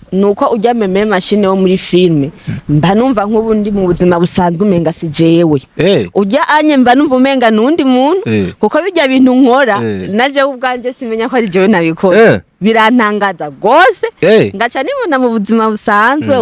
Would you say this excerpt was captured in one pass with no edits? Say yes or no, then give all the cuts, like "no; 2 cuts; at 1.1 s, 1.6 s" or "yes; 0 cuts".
yes; 0 cuts